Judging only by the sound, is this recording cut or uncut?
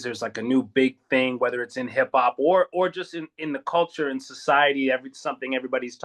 uncut